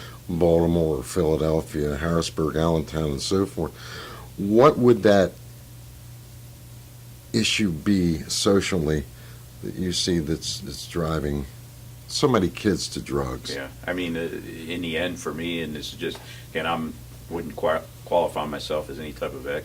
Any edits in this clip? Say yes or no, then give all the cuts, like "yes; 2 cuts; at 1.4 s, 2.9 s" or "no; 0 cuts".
yes; 1 cut; at 8.4 s